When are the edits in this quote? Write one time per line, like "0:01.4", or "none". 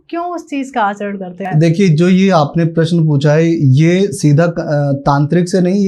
0:01.4